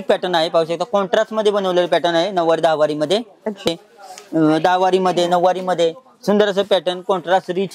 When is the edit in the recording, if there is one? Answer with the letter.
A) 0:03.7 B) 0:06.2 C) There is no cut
A